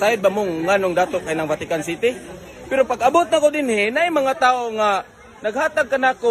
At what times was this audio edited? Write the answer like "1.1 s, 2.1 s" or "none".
4.6 s